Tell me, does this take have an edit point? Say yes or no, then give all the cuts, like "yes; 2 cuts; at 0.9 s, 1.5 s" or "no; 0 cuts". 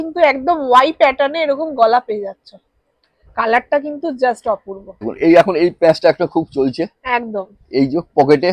no; 0 cuts